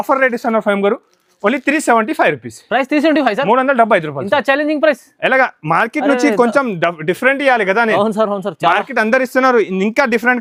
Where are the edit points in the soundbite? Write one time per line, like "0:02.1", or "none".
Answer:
none